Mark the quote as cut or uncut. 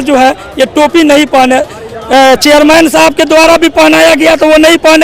uncut